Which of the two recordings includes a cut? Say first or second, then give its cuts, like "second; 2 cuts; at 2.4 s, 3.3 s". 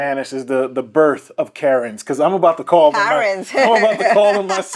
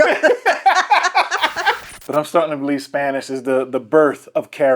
second; 1 cut; at 1.8 s